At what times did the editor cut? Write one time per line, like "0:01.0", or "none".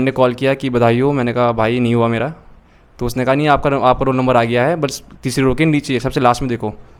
none